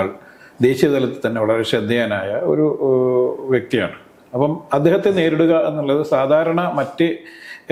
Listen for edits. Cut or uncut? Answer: uncut